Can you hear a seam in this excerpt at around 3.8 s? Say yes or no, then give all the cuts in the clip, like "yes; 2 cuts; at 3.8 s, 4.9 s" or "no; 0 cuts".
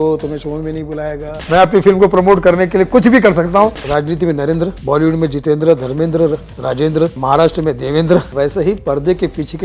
yes; 5 cuts; at 1.4 s, 3.8 s, 4.8 s, 7.2 s, 8.3 s